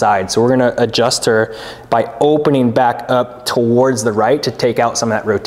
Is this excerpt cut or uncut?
uncut